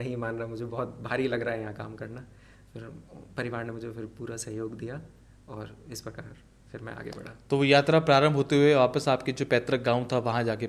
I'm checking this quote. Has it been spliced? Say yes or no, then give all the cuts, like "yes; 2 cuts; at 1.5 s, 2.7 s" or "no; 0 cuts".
no; 0 cuts